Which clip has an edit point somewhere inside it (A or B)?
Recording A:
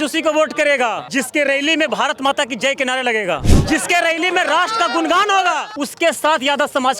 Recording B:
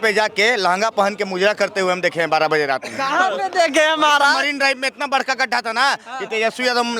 A